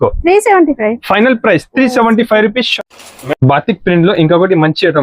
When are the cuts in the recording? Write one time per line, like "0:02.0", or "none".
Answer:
0:02.7